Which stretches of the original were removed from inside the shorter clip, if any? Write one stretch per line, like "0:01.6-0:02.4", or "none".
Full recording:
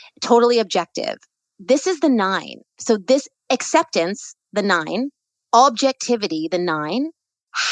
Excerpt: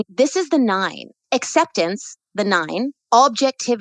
0:02.7-0:03.3
0:05.2-0:05.4